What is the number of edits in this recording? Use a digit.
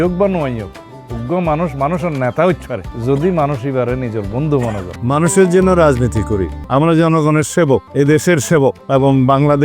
4